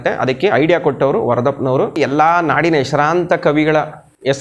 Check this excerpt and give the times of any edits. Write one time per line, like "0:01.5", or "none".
0:02.0